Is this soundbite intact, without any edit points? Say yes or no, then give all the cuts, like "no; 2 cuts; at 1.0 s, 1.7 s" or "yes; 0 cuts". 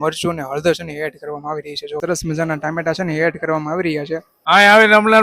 no; 2 cuts; at 2.0 s, 4.3 s